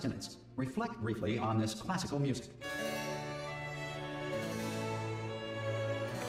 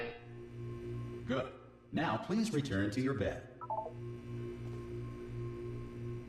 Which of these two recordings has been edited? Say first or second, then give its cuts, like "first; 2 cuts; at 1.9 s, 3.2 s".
second; 1 cut; at 1.1 s